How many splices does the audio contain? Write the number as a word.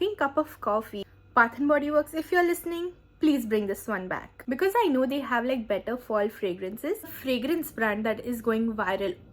three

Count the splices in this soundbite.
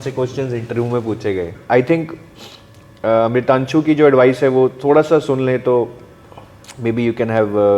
one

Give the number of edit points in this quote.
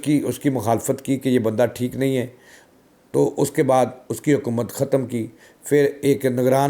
zero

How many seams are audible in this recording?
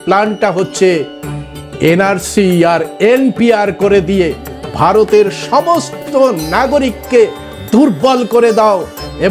zero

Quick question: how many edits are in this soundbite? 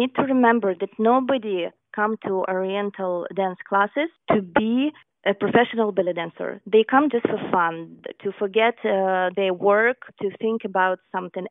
three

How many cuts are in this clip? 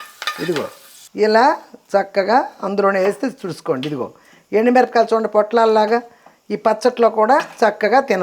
one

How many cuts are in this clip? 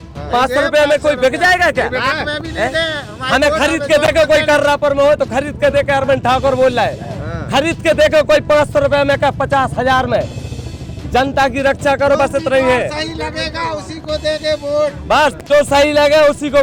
zero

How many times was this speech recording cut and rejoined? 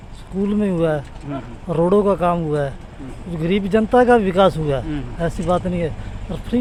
zero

